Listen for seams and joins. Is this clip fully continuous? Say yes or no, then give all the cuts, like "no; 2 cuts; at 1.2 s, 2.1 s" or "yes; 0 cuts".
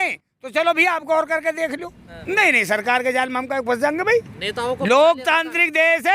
no; 1 cut; at 2.1 s